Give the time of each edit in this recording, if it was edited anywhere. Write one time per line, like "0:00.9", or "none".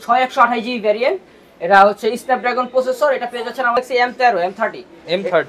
0:03.8